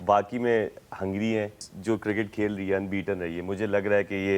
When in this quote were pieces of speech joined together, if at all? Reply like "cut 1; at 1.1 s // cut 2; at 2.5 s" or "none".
cut 1; at 1.7 s